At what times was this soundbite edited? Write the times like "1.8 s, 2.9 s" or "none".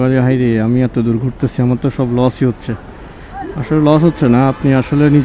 none